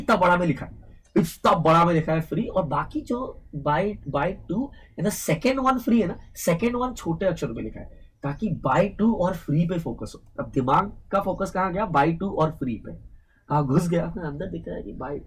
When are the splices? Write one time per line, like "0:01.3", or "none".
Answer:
none

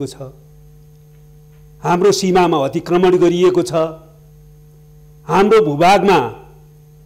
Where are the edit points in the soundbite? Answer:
none

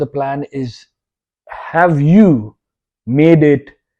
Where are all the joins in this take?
none

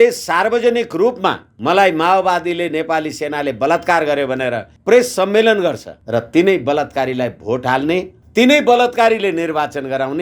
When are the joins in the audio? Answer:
0:01.5
0:04.7
0:05.9
0:08.2

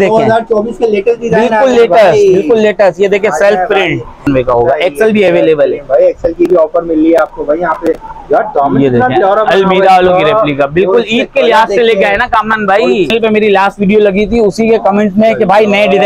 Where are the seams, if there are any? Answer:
0:04.2
0:13.1

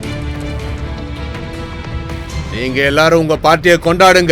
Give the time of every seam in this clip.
0:02.4

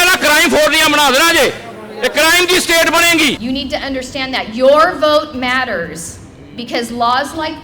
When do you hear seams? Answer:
0:03.4

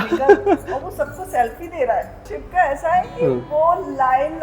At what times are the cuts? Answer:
0:02.3

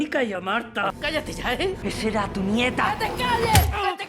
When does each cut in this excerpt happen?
0:01.8

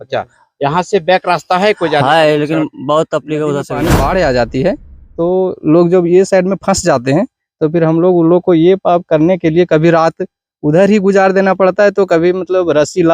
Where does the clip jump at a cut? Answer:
0:03.7

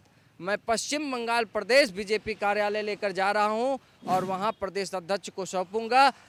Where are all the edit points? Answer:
none

